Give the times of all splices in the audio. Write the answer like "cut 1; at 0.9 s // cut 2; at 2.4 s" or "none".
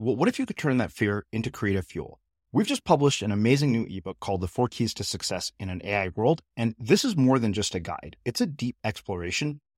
none